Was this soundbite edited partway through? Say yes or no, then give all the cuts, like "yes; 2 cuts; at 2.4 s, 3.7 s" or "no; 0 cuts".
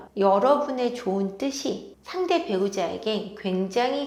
no; 0 cuts